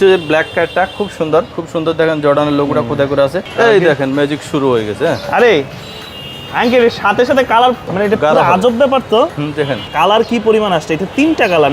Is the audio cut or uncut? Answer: cut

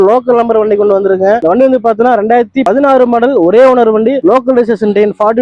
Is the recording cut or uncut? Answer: uncut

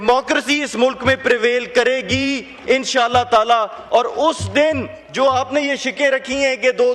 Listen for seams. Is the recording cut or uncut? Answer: uncut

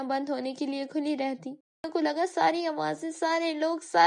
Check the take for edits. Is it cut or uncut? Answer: cut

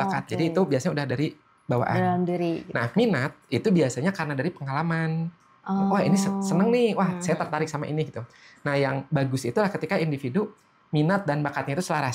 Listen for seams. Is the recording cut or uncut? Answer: uncut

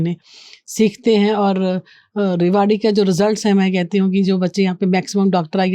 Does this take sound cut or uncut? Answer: uncut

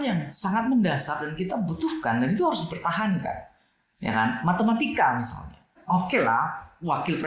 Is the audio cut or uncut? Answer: cut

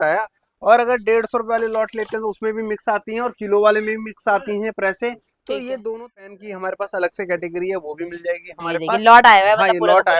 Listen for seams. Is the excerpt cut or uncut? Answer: cut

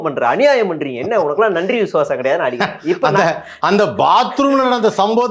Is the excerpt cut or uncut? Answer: uncut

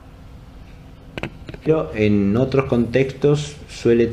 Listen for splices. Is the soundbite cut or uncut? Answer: uncut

